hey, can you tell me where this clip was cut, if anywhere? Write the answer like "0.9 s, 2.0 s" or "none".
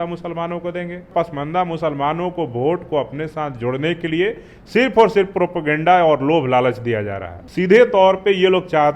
1.1 s, 7.4 s